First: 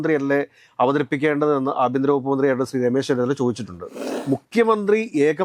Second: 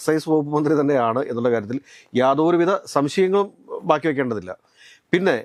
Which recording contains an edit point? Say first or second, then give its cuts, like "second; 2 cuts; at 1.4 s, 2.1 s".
first; 1 cut; at 4.1 s